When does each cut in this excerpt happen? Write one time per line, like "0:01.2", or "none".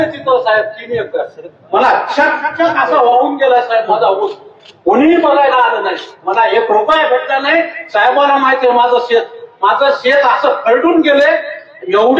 none